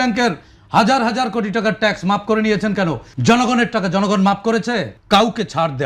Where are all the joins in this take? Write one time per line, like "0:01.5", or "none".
0:03.1
0:04.9